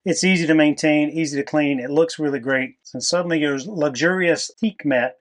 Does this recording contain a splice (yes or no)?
yes